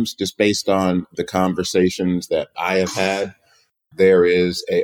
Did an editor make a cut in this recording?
yes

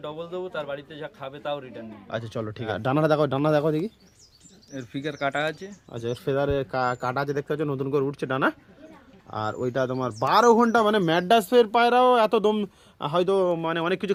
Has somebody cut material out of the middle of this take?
no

